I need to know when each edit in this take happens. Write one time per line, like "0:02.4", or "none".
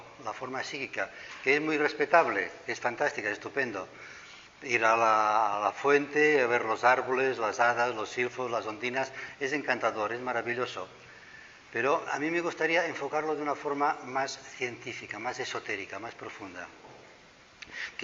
0:14.3

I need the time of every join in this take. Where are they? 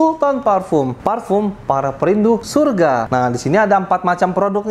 0:01.0
0:02.7

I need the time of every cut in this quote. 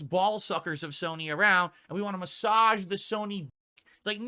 none

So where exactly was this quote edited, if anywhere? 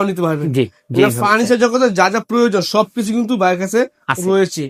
none

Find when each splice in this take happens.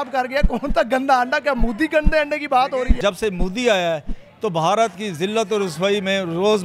0:02.9

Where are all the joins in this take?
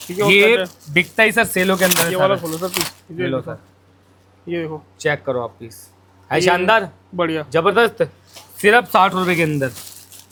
none

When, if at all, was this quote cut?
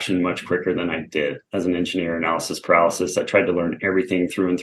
0:01.5

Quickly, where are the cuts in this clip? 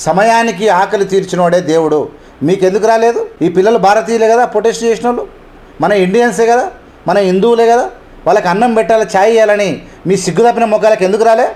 none

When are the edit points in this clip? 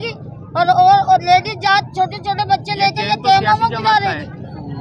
none

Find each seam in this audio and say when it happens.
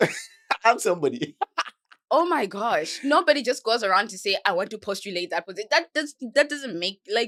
none

